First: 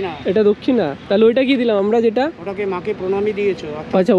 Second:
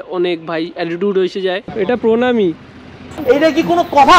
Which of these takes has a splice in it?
second; 1 cut; at 1.7 s

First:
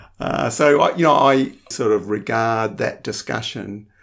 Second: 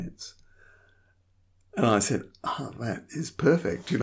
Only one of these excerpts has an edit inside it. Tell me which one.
first; 1 cut; at 1.7 s

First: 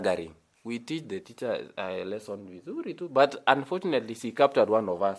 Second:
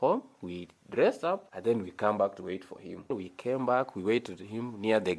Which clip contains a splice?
second; 2 cuts; at 1.5 s, 3.2 s

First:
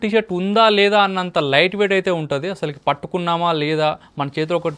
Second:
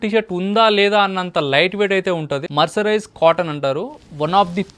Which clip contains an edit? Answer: second; 1 cut; at 2.5 s

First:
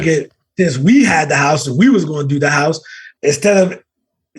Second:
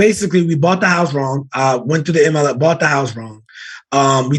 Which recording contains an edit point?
first; 1 cut; at 3.1 s

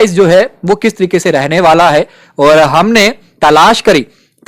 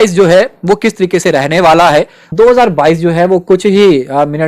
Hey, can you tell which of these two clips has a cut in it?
second; 1 cut; at 2.2 s

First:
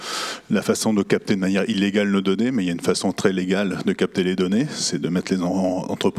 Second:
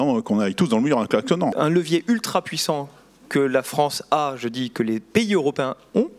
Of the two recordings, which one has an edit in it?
second; 1 cut; at 1.5 s

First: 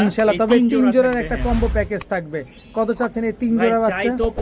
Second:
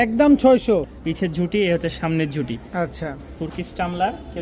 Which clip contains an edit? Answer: second; 1 cut; at 0.9 s

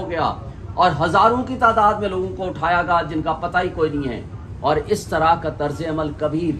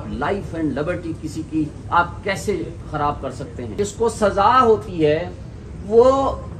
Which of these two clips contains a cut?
second; 1 cut; at 3.7 s

